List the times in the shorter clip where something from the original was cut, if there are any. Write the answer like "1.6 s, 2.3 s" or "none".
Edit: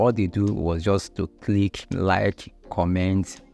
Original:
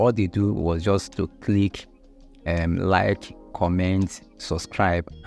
1.9 s